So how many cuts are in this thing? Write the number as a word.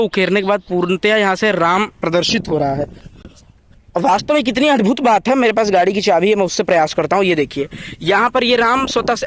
zero